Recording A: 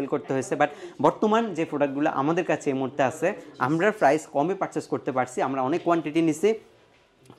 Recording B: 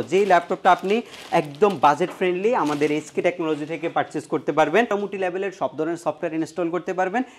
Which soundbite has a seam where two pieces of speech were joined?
B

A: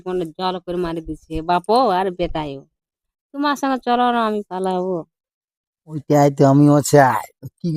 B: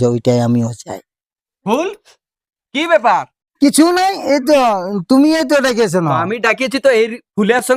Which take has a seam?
B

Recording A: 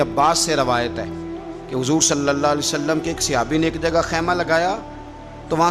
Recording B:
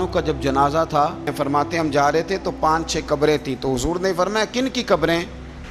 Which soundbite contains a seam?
B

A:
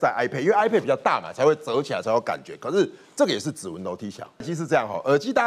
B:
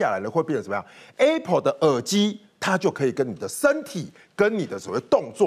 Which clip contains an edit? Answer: A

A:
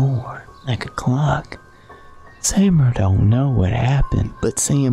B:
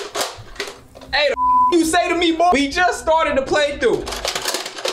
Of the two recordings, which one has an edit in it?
B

